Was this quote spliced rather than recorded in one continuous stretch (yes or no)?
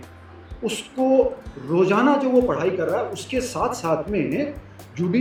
no